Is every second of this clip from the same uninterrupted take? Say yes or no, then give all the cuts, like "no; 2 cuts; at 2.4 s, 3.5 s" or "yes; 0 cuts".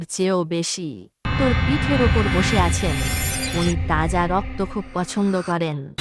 no; 1 cut; at 1.3 s